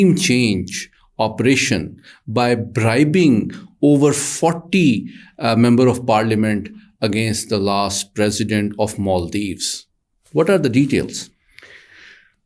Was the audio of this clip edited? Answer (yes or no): no